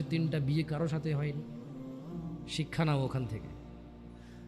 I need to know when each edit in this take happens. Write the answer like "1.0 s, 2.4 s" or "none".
1.5 s, 2.5 s, 3.4 s

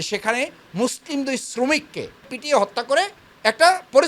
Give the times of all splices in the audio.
2.2 s

